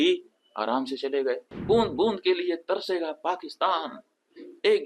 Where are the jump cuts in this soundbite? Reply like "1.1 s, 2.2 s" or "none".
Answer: 1.5 s